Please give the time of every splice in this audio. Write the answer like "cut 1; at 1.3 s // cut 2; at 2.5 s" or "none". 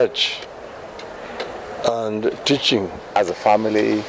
cut 1; at 3.2 s